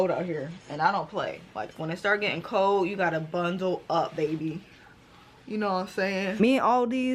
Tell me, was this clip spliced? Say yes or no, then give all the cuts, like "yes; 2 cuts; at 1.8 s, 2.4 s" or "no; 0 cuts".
yes; 2 cuts; at 1.7 s, 6.4 s